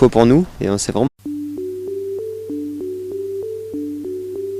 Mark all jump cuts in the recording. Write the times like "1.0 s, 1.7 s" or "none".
none